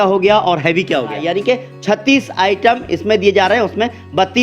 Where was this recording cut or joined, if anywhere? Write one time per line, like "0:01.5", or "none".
0:01.2